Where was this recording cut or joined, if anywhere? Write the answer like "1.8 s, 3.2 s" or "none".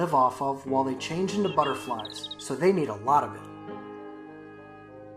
3.3 s